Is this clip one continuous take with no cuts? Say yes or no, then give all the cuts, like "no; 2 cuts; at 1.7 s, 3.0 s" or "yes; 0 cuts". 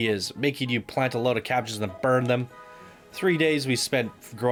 yes; 0 cuts